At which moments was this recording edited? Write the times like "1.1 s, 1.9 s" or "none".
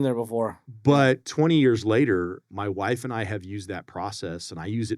2.5 s